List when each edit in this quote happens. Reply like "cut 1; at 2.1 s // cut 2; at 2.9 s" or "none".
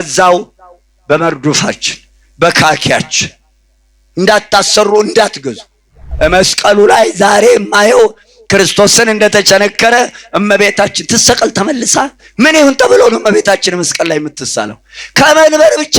cut 1; at 6.0 s

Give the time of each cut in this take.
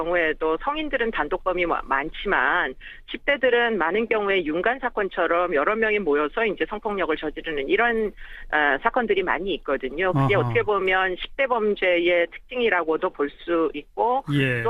none

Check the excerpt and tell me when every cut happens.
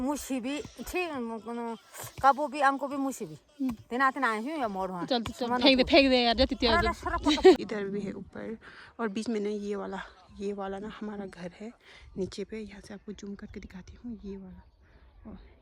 cut 1; at 7.6 s

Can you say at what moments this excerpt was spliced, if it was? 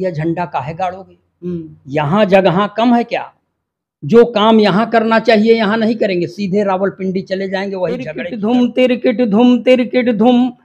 cut 1; at 8.2 s

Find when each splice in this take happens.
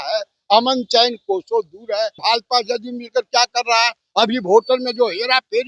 cut 1; at 2.2 s

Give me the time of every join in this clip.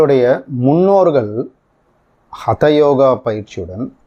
none

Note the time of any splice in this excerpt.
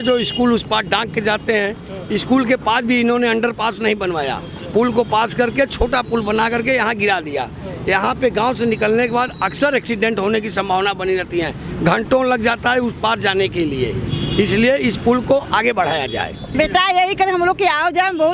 cut 1; at 16.4 s

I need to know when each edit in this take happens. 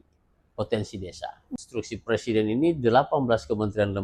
cut 1; at 1.6 s

